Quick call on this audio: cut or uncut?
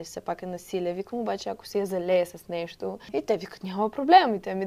cut